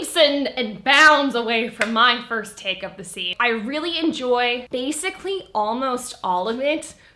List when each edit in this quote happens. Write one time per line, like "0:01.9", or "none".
0:03.3
0:04.6